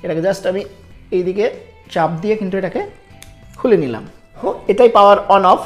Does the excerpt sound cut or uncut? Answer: cut